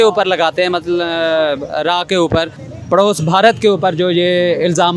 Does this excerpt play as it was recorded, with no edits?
no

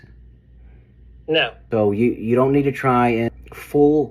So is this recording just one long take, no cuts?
no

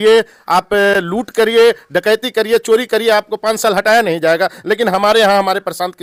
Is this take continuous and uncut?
yes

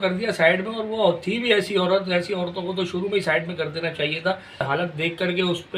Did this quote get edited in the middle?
yes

